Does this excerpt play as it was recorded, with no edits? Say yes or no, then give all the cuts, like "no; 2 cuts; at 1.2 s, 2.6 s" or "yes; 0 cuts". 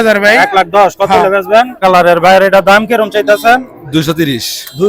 no; 1 cut; at 1.8 s